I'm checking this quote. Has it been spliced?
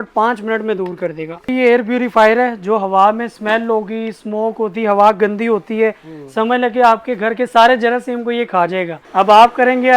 yes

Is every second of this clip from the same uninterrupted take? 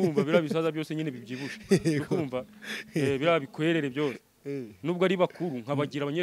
yes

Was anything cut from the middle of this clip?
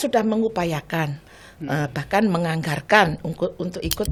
no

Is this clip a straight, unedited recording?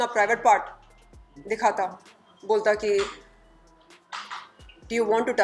yes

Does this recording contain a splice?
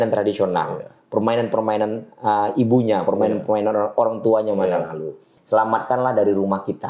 yes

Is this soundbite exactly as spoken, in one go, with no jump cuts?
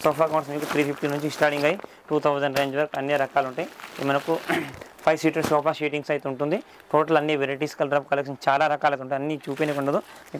yes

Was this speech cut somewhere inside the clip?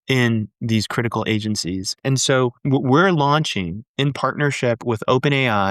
yes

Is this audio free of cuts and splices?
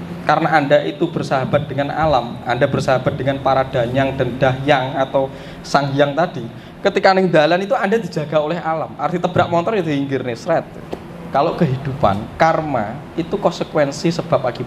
no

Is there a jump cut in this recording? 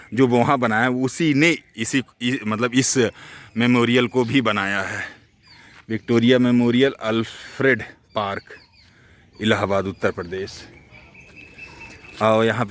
no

